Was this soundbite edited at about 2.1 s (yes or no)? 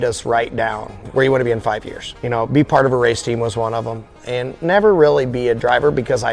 yes